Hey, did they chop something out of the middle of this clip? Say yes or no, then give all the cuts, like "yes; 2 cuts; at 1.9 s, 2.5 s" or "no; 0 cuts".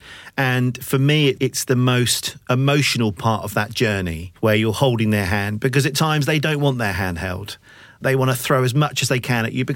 yes; 1 cut; at 4.2 s